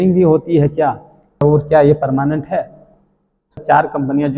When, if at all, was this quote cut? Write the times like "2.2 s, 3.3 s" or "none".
1.4 s, 3.6 s